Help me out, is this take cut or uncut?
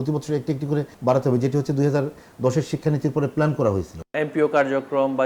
cut